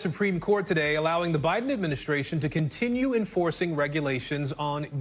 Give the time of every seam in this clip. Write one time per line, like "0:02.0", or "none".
none